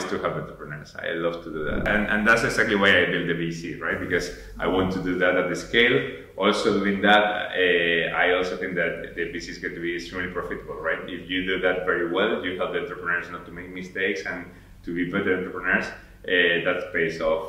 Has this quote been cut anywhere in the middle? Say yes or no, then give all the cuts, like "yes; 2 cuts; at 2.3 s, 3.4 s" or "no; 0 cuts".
yes; 1 cut; at 1.9 s